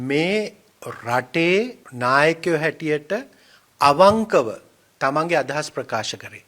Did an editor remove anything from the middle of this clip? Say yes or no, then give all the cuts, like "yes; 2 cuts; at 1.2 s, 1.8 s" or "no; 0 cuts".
yes; 1 cut; at 1.8 s